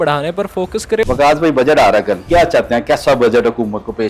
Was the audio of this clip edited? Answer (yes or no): yes